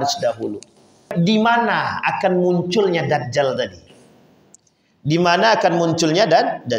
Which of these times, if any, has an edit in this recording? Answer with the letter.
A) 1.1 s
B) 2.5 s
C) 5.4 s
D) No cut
A